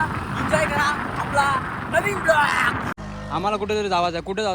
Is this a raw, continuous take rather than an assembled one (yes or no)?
no